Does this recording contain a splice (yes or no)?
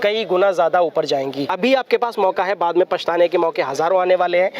yes